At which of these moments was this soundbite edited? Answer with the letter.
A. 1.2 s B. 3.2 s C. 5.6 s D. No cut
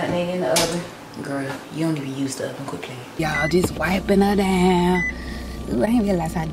B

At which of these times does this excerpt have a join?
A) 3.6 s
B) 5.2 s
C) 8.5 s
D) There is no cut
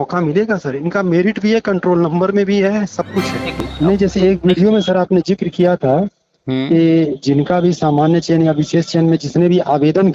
A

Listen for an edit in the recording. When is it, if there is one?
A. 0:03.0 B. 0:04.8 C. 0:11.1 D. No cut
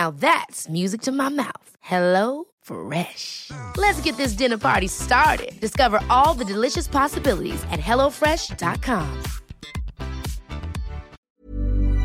C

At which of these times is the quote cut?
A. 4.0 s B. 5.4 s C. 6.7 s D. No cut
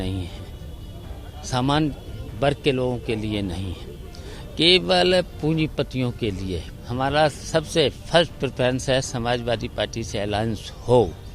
C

